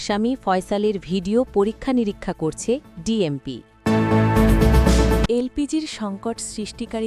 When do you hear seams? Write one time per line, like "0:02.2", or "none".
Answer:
0:03.7
0:05.3